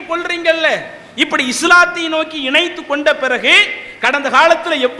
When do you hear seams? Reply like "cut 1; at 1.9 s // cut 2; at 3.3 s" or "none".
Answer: none